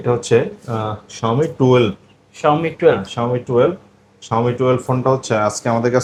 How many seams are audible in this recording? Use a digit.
0